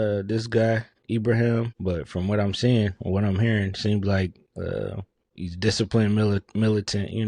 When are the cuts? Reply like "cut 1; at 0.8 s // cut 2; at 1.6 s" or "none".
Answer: cut 1; at 0.9 s // cut 2; at 1.7 s